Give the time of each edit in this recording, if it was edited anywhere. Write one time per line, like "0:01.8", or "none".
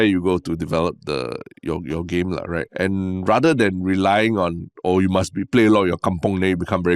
0:02.7